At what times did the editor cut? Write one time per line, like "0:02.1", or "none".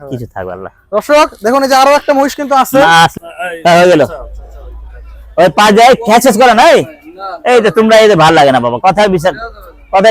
0:03.2